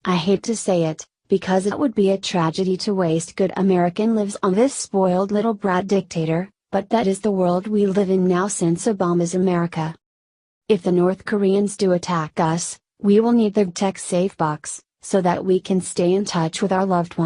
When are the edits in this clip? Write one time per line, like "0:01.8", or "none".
0:05.1